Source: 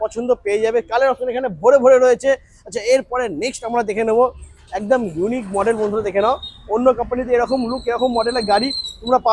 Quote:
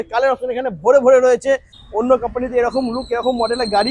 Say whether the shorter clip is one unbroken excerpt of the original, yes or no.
no